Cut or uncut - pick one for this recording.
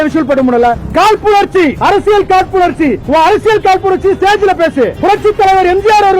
cut